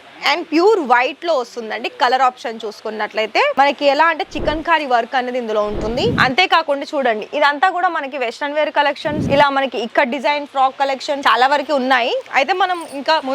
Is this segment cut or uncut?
cut